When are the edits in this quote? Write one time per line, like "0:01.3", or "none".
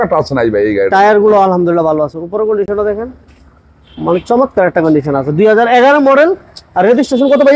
none